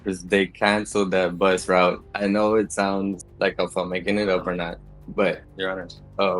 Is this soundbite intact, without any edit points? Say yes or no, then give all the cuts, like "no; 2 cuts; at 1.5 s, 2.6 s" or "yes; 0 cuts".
no; 2 cuts; at 2.1 s, 5.5 s